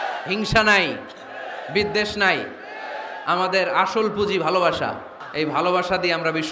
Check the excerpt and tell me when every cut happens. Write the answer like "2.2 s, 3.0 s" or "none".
5.2 s